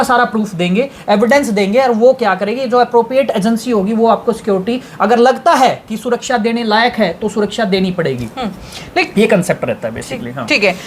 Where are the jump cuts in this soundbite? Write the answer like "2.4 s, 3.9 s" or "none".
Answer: none